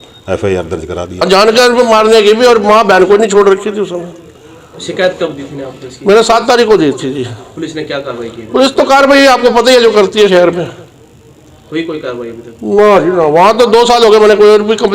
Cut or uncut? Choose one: cut